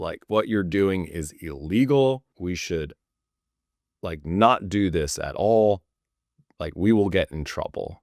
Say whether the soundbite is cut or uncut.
cut